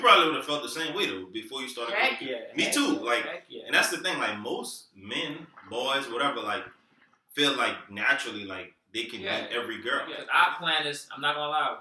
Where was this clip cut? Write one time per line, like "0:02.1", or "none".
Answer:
0:10.2

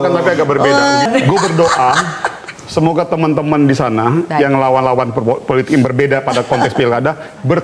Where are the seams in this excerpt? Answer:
0:01.1

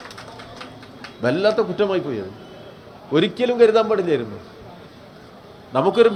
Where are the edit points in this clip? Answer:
none

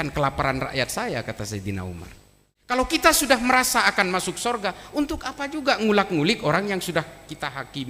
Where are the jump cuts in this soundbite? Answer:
0:02.7

